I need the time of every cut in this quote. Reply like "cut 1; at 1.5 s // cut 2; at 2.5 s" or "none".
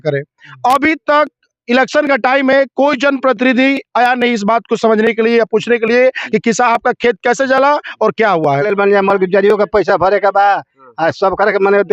cut 1; at 8.7 s